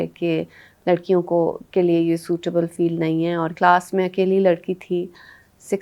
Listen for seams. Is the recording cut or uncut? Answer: cut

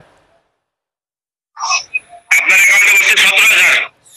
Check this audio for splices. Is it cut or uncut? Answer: uncut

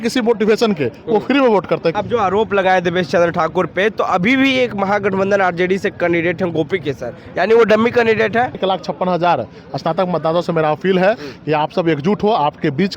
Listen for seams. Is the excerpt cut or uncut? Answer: cut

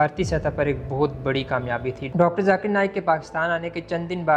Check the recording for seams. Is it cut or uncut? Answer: cut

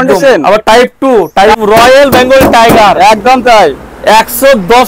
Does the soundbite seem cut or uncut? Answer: cut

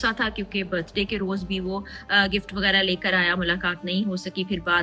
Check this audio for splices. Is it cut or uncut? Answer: uncut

